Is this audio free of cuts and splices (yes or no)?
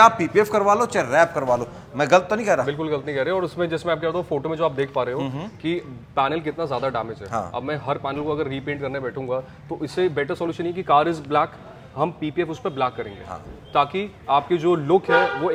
yes